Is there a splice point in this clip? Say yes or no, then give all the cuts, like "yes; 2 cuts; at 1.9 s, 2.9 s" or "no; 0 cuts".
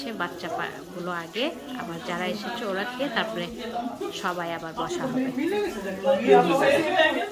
no; 0 cuts